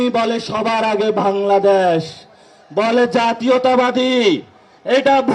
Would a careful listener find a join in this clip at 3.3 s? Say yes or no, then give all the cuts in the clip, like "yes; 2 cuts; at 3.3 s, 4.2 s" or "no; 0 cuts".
no; 0 cuts